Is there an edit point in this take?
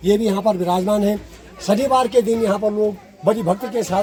no; 0 cuts

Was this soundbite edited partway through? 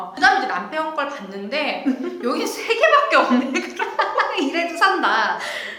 yes; 1 cut; at 4.3 s

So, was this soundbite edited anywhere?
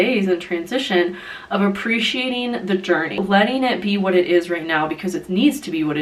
yes; 1 cut; at 3.1 s

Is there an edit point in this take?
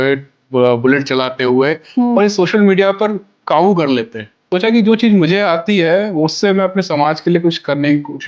yes; 1 cut; at 4.5 s

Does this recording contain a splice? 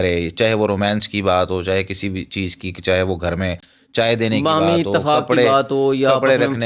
no; 0 cuts

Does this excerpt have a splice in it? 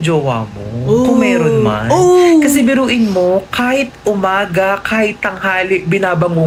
no; 0 cuts

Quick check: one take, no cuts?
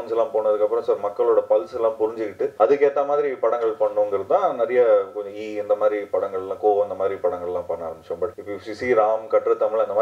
no; 2 cuts; at 2.5 s, 8.4 s

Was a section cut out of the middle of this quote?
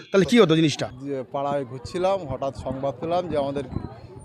yes; 1 cut; at 1.0 s

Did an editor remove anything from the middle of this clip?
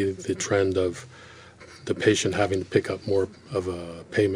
yes; 1 cut; at 1.6 s

